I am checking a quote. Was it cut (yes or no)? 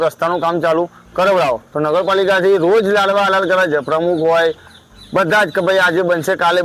no